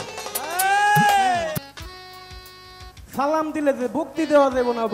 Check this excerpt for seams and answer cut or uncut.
cut